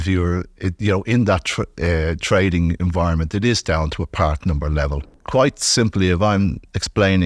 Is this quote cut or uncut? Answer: cut